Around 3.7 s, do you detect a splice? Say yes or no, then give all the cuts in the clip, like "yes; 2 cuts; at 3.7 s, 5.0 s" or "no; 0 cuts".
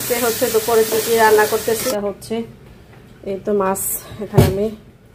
no; 1 cut; at 1.9 s